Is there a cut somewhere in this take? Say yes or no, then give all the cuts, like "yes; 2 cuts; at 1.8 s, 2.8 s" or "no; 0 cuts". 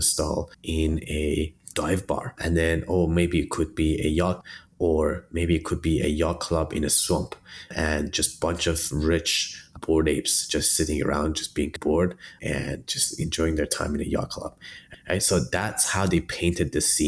no; 0 cuts